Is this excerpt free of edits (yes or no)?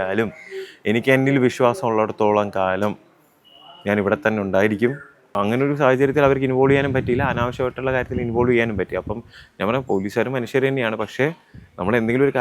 no